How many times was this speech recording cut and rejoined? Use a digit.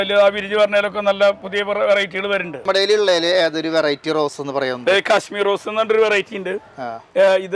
1